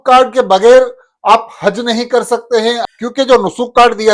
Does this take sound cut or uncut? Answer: cut